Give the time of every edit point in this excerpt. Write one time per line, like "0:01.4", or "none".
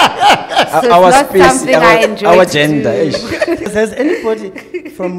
0:03.7